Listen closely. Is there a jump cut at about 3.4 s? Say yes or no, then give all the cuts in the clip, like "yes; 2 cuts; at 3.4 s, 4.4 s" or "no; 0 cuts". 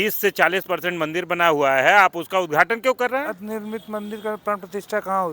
yes; 1 cut; at 3.4 s